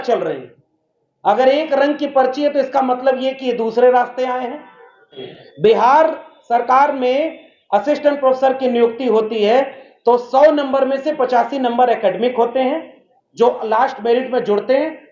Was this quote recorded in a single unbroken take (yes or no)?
no